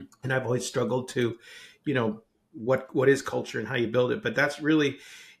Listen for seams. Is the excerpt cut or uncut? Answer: uncut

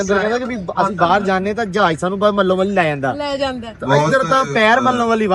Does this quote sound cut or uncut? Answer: uncut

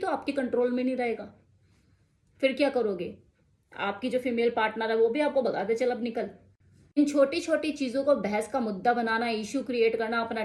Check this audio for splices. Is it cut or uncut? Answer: uncut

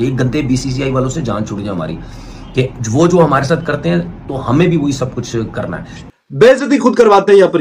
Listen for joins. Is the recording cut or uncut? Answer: cut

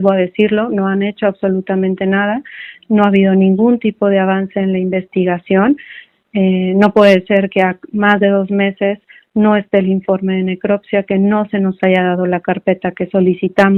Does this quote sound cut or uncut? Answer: uncut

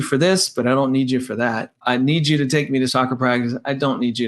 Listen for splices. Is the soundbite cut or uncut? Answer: cut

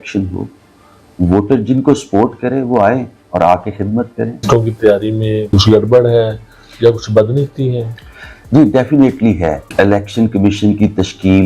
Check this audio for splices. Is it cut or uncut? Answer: cut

